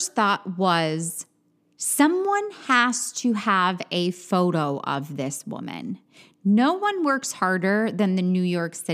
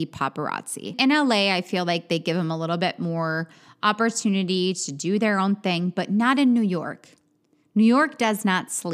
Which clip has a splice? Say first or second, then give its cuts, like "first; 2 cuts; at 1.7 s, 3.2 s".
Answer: second; 1 cut; at 1.0 s